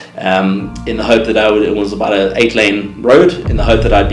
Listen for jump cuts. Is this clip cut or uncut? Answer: uncut